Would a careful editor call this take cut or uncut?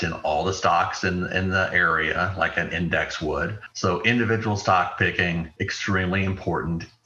cut